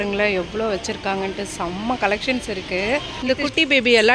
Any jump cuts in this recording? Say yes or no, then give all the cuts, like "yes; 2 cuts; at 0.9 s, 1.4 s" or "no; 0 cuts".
yes; 1 cut; at 3.1 s